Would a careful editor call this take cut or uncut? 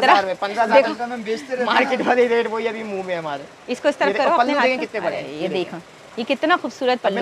uncut